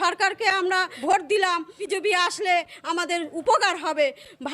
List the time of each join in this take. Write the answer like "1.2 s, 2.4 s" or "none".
0.9 s, 1.8 s